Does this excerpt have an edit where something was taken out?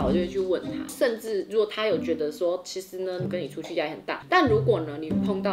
yes; 1 cut; at 4.2 s

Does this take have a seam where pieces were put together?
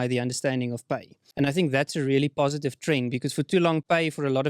yes; 1 cut; at 1.2 s

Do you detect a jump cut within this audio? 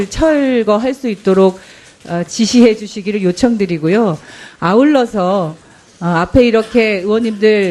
yes; 1 cut; at 4.1 s

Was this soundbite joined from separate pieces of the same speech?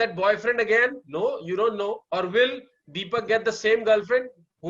yes; 1 cut; at 2.0 s

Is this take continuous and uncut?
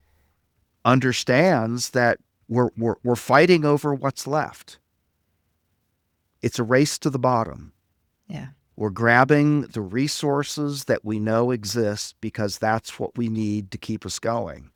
yes; 0 cuts

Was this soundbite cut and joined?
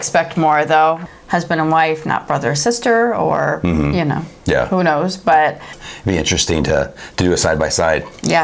yes; 2 cuts; at 1.0 s, 5.8 s

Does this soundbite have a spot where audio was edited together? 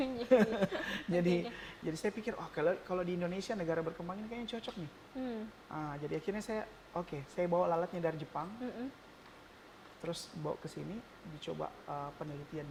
no; 0 cuts

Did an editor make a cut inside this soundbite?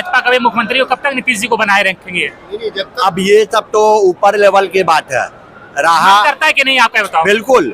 no; 0 cuts

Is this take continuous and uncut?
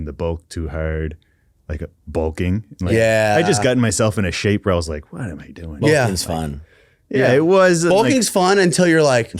yes; 0 cuts

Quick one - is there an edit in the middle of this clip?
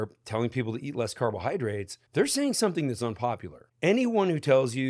yes; 2 cuts; at 1.9 s, 3.6 s

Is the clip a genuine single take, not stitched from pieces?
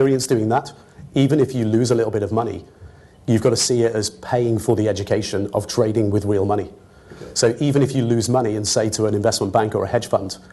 yes; 0 cuts

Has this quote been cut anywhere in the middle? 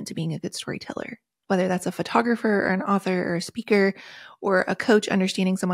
no; 0 cuts

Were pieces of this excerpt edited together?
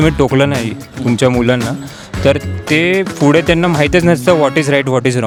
no; 0 cuts

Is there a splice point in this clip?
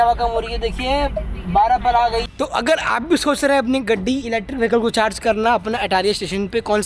yes; 1 cut; at 2.3 s

